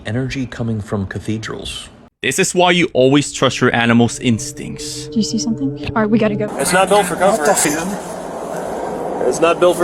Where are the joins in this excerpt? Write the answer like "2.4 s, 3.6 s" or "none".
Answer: 2.2 s, 6.5 s